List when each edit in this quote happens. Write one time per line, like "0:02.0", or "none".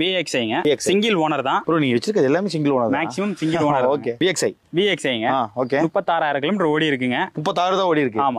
none